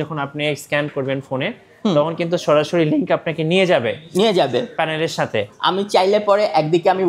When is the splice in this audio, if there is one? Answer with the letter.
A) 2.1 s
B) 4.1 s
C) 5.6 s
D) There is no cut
C